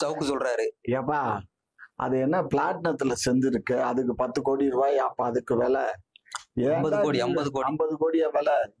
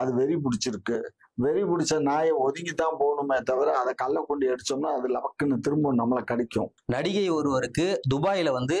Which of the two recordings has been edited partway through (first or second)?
second